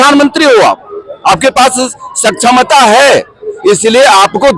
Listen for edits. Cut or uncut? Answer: uncut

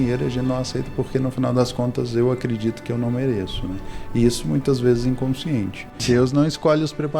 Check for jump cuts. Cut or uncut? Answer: cut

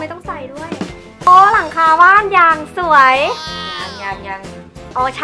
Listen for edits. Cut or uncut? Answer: cut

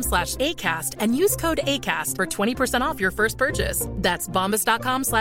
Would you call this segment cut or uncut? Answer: uncut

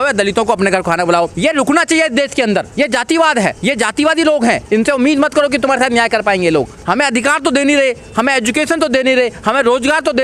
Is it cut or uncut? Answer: cut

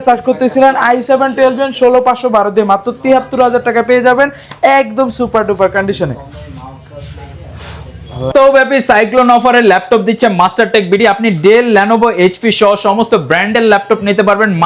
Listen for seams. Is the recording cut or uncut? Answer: uncut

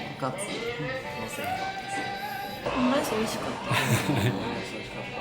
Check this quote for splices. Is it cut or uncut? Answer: cut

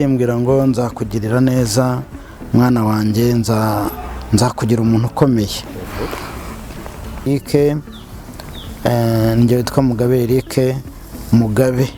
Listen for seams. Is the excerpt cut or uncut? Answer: cut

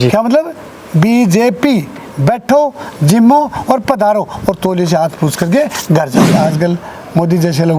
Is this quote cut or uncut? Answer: cut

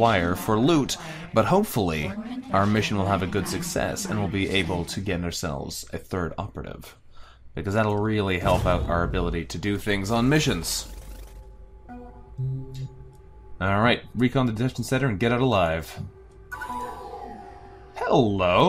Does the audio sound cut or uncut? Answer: cut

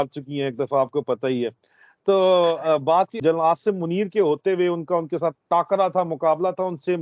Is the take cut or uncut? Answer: cut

